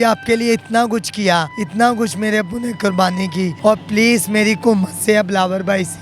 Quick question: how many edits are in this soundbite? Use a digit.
2